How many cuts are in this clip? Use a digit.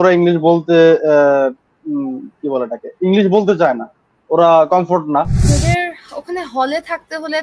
1